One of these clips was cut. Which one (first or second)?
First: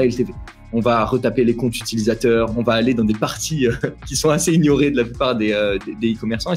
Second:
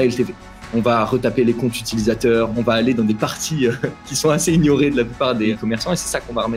second